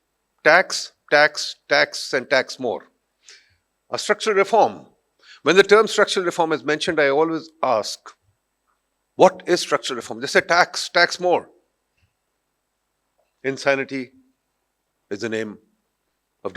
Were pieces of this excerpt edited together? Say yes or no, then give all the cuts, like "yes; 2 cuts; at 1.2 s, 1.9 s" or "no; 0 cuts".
no; 0 cuts